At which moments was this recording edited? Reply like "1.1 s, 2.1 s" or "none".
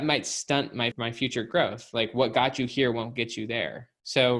0.9 s